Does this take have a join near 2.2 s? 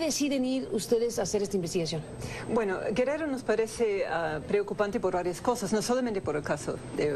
yes; 1 cut; at 2.2 s

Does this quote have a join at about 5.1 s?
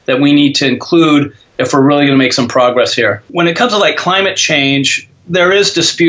no; 1 cut; at 3.2 s

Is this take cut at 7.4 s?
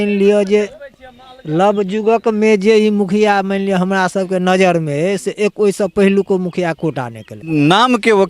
yes; 1 cut; at 7.4 s

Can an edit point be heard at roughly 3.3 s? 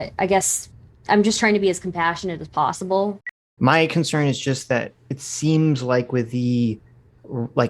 yes; 1 cut; at 3.3 s

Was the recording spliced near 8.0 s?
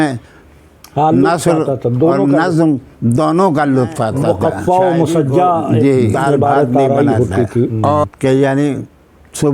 yes; 1 cut; at 8.0 s

